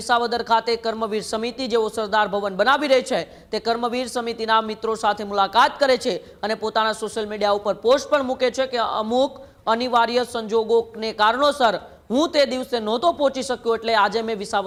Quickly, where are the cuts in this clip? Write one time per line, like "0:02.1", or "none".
none

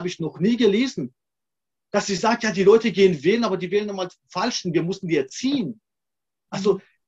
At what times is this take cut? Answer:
none

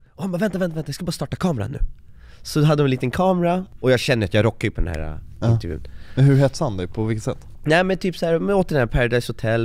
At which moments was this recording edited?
none

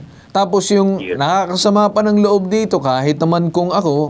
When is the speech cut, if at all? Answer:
none

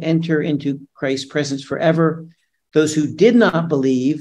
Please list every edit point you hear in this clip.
none

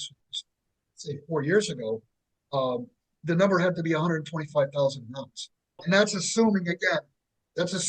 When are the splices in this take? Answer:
0:05.8

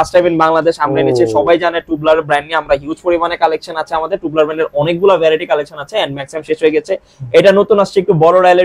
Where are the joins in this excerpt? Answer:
none

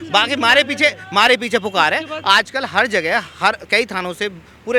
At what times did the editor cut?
none

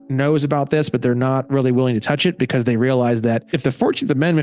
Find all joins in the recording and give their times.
0:03.5

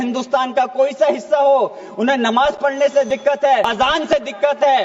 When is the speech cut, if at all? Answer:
0:03.7

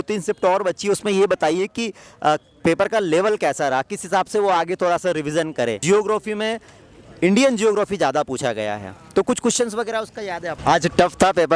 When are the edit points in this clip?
0:05.8
0:10.5

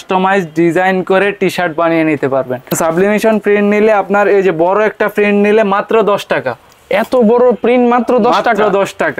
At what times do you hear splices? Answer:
0:02.7

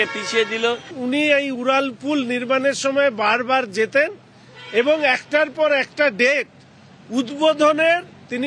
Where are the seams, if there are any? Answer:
0:00.9

